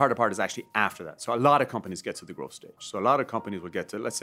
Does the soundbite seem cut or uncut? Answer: uncut